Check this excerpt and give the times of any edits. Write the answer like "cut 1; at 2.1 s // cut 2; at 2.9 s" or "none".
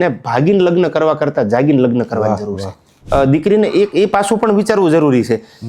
cut 1; at 2.9 s